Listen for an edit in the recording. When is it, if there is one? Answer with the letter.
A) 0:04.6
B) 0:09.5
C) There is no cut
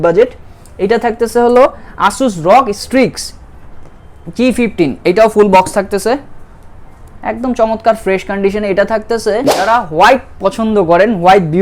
B